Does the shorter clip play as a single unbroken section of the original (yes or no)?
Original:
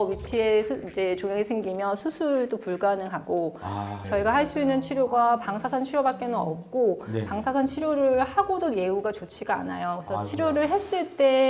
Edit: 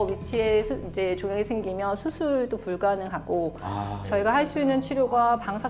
yes